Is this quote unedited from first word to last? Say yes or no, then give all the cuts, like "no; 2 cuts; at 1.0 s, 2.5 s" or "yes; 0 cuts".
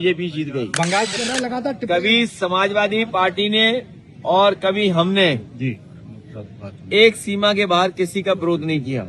no; 1 cut; at 1.1 s